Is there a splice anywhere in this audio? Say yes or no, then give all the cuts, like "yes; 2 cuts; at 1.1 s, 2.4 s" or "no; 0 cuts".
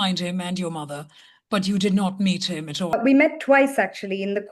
yes; 1 cut; at 3.0 s